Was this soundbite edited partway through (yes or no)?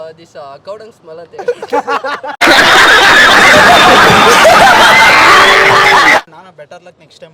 yes